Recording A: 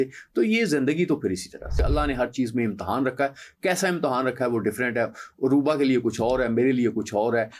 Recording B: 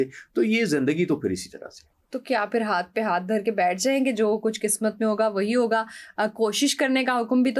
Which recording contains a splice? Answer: A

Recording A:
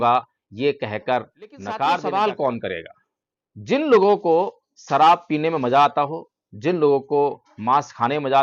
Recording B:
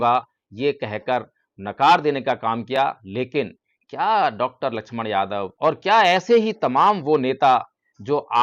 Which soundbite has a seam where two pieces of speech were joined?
A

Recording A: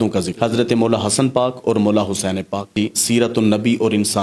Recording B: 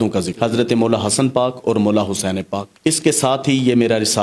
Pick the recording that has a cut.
A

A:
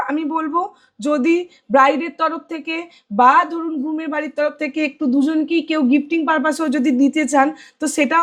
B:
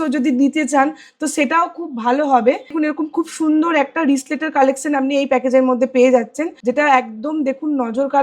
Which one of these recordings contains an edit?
B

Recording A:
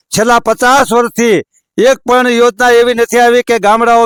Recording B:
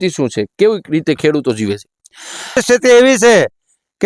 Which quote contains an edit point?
B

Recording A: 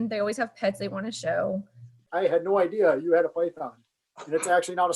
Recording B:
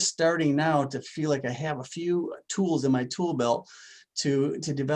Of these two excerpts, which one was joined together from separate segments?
A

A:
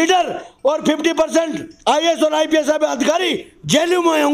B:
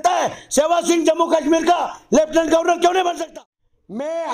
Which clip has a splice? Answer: B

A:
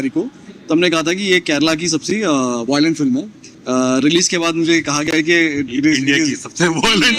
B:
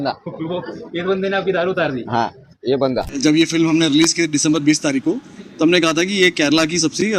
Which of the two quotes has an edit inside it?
B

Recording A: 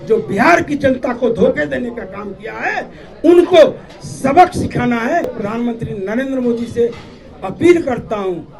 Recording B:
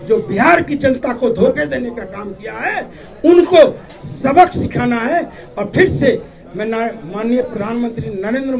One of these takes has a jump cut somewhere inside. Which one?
A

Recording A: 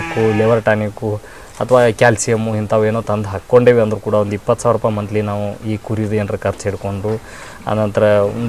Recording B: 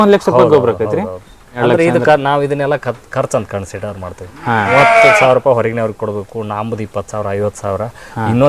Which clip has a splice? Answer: B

